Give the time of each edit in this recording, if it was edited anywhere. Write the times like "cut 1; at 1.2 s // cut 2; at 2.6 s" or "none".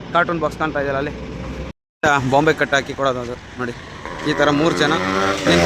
cut 1; at 1.7 s